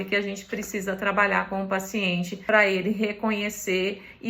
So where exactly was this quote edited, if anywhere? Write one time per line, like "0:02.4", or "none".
0:02.4

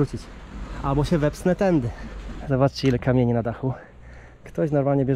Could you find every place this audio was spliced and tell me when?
0:02.4

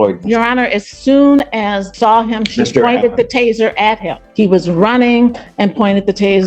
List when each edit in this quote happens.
0:01.9
0:04.2

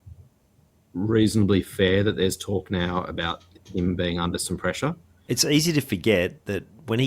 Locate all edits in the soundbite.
0:05.1

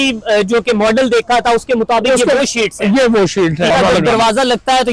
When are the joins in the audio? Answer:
0:03.7

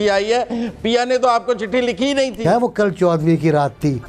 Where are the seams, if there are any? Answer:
0:02.4

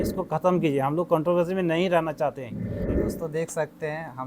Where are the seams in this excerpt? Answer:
0:02.8

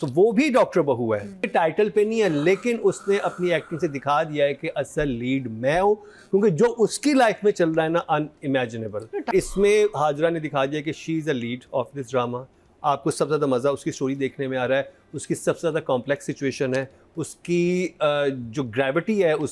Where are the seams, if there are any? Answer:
0:01.4
0:09.3

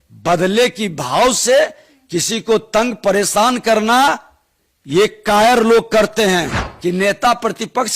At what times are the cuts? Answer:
0:06.6

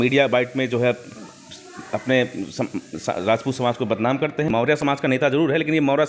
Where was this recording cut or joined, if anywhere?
0:04.5

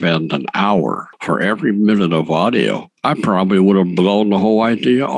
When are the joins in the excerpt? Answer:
none

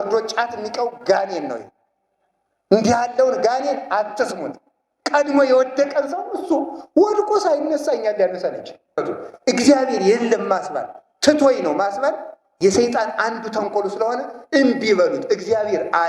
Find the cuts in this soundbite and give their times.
0:09.0

